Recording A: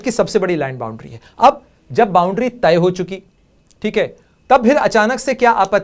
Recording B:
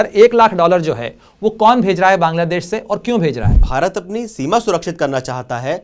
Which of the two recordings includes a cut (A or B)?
B